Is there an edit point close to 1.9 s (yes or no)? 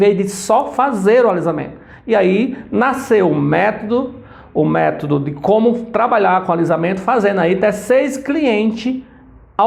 no